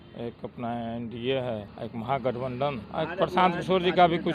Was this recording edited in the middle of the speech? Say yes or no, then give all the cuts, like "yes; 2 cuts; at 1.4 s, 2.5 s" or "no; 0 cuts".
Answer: yes; 2 cuts; at 1.8 s, 2.8 s